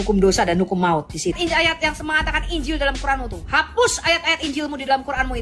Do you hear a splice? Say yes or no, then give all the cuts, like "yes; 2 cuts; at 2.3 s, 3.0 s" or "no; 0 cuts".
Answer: yes; 1 cut; at 1.4 s